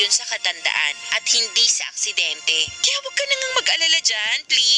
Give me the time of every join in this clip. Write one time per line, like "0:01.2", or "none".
0:01.0
0:02.8